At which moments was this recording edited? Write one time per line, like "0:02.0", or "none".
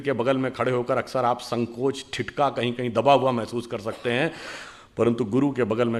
none